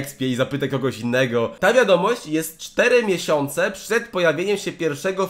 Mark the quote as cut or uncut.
cut